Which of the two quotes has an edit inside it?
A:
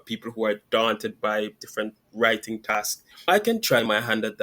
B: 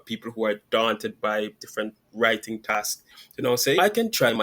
A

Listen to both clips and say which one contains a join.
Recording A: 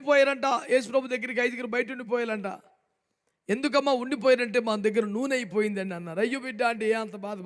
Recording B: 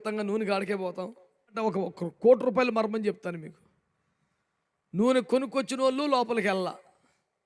B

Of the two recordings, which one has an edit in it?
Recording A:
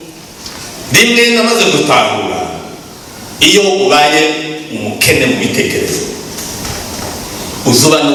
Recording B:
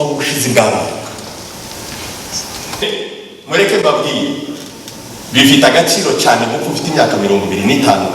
B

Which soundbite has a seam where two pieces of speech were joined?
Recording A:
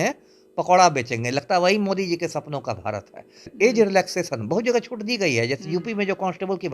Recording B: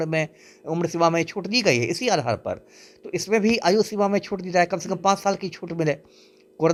A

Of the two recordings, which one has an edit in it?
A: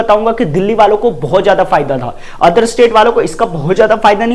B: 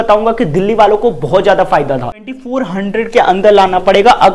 B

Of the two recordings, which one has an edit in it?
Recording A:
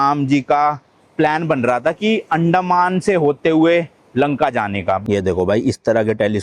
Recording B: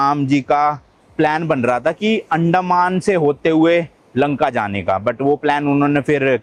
A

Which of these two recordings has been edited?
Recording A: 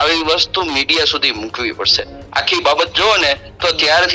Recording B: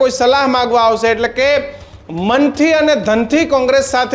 A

